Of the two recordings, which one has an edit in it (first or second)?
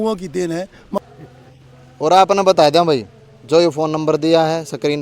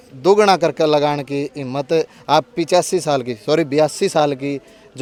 first